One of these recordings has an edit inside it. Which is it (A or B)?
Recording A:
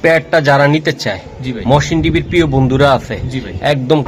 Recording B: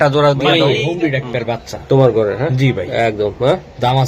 B